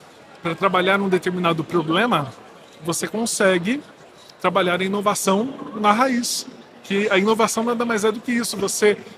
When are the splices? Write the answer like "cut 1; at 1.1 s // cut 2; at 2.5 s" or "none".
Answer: none